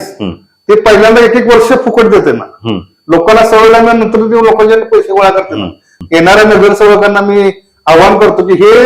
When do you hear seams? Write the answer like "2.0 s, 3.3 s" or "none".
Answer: 5.9 s